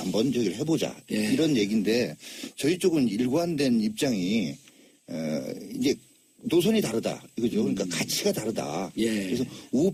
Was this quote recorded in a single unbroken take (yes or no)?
yes